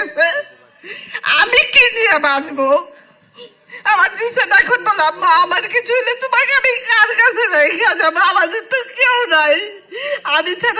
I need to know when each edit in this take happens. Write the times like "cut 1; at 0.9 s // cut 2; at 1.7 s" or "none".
none